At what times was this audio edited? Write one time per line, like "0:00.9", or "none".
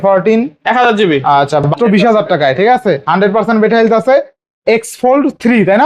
0:01.7